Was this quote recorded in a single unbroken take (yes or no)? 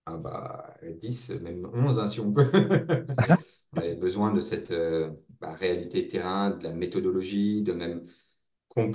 no